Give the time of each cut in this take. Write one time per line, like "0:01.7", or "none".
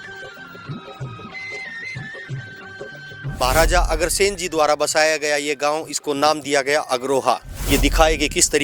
0:03.4
0:07.5